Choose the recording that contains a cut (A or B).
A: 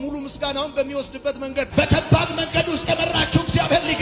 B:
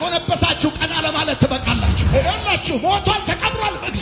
B